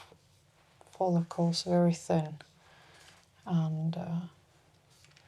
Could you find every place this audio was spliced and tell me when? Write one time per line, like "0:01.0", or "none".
none